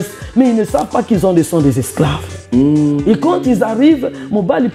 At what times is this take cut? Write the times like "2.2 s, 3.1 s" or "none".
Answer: none